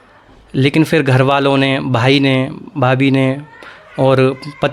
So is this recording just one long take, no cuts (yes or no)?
yes